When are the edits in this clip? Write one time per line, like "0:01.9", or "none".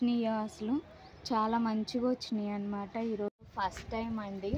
0:03.3